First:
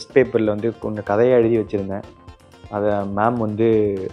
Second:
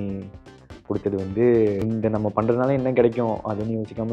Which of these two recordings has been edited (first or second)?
second